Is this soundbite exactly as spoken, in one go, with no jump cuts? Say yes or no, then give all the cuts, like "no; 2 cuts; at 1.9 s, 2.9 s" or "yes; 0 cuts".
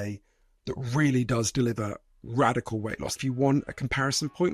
no; 1 cut; at 3.2 s